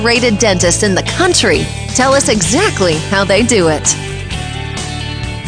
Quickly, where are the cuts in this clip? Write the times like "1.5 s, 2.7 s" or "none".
none

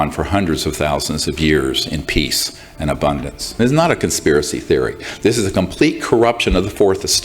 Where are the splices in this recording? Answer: 3.5 s

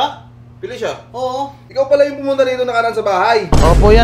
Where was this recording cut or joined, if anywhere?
1.6 s

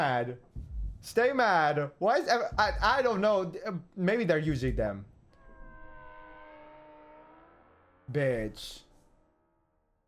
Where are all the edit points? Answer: none

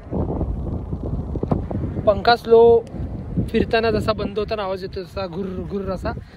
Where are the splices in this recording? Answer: none

